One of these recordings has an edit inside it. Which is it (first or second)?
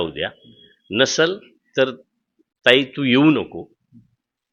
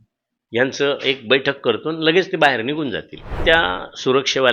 second